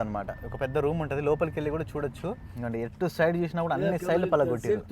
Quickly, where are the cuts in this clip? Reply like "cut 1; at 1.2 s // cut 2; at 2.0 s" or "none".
cut 1; at 2.5 s